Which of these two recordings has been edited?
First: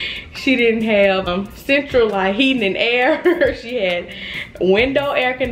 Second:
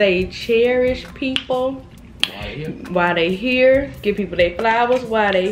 first; 1 cut; at 1.2 s

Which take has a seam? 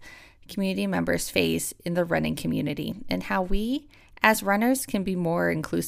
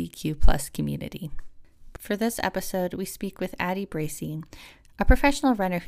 second; 1 cut; at 1.9 s

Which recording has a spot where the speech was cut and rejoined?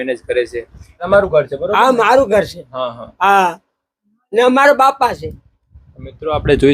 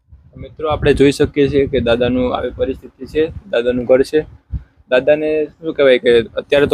first; 1 cut; at 1.1 s

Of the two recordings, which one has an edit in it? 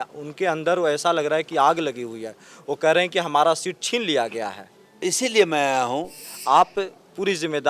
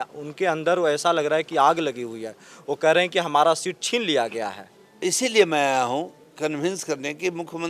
first; 1 cut; at 6.2 s

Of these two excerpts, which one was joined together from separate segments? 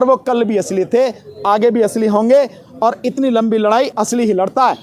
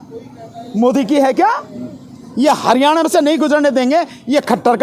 first; 1 cut; at 3.9 s

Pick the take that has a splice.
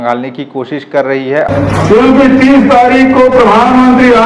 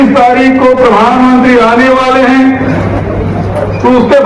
first; 1 cut; at 1.5 s

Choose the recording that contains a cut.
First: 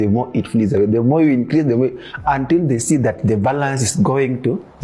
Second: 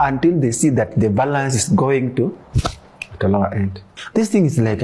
second; 1 cut; at 3.9 s

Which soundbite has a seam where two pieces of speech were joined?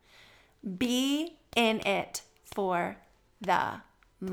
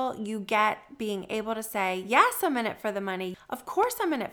second; 1 cut; at 3.3 s

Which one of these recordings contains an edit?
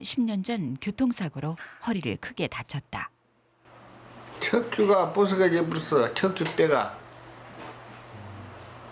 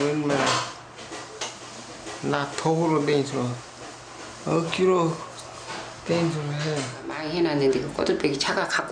second; 1 cut; at 7.2 s

